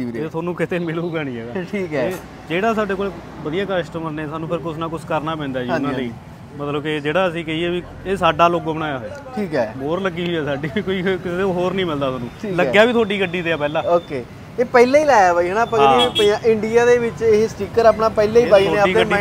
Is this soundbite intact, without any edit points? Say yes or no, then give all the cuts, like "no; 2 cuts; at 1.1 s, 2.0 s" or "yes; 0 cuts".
yes; 0 cuts